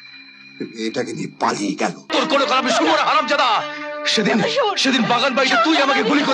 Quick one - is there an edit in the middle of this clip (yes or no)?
yes